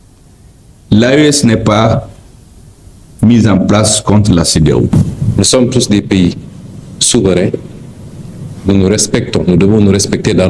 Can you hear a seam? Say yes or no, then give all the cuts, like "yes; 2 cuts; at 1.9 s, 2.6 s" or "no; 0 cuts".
yes; 1 cut; at 5.0 s